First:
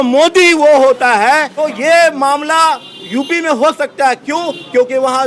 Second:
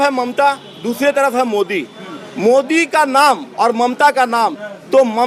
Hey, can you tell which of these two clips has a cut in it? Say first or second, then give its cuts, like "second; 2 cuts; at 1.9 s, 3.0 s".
first; 1 cut; at 1.6 s